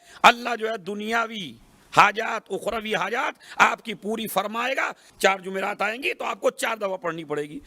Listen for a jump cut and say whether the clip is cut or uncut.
cut